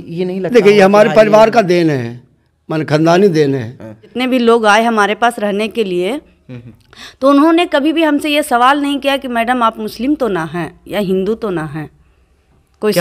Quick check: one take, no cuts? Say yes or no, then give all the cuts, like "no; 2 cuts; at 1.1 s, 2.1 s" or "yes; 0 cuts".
no; 1 cut; at 4.1 s